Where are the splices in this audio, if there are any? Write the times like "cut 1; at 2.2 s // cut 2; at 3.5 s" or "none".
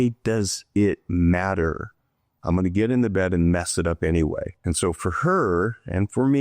cut 1; at 4.5 s